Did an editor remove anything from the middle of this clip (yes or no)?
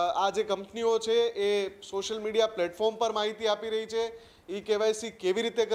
no